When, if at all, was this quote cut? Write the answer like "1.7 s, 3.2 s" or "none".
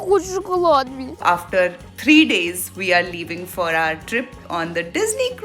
1.2 s, 4.4 s